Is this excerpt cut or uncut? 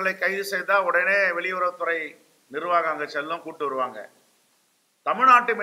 uncut